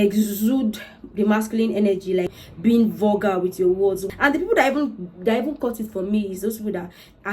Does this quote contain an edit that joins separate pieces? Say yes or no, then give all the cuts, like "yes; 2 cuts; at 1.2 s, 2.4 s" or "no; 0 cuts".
yes; 2 cuts; at 2.4 s, 4.0 s